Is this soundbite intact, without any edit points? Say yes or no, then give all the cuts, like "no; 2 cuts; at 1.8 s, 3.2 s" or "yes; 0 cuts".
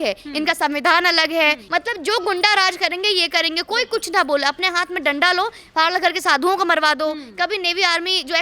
no; 1 cut; at 1.6 s